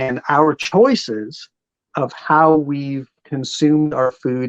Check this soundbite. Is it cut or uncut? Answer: uncut